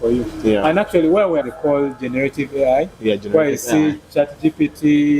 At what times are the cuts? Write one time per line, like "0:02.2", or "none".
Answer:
0:01.5